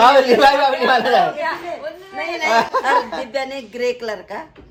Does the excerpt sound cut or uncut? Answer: uncut